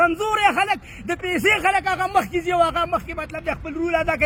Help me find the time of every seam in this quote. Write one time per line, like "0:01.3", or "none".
none